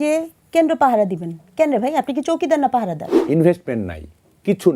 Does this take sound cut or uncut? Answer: cut